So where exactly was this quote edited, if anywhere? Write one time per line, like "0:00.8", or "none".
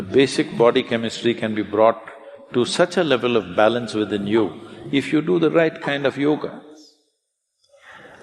none